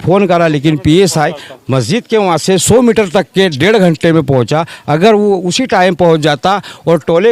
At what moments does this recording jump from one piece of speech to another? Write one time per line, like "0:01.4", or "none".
none